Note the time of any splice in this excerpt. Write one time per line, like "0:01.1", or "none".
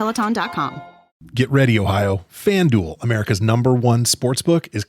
0:01.3